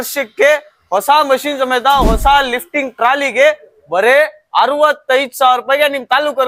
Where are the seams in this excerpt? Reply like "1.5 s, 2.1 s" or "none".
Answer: none